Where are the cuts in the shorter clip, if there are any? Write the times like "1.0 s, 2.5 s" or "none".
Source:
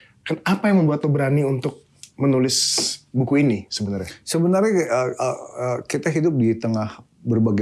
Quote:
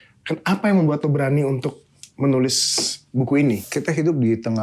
3.7 s